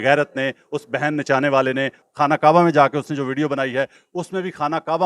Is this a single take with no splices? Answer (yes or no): no